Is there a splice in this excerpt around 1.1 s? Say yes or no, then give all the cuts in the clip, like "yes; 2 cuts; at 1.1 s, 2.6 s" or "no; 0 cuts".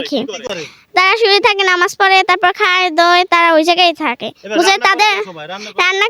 no; 0 cuts